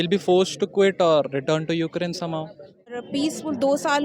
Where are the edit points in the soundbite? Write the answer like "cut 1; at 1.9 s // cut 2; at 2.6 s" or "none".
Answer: cut 1; at 3.0 s